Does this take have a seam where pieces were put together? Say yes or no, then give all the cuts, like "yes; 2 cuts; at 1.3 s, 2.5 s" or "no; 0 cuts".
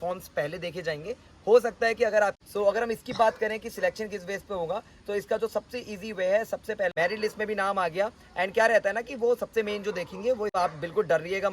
yes; 3 cuts; at 2.4 s, 6.9 s, 10.6 s